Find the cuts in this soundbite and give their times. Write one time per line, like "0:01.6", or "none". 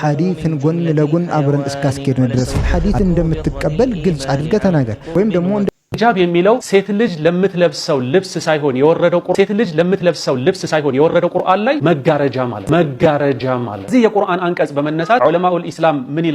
0:05.7